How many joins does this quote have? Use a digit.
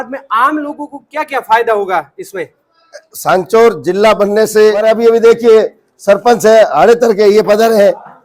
1